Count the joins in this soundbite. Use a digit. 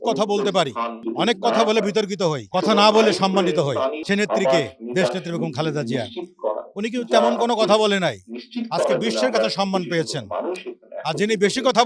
3